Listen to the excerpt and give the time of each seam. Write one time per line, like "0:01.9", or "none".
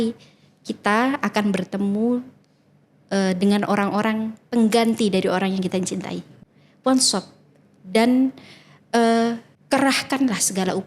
0:06.3
0:09.5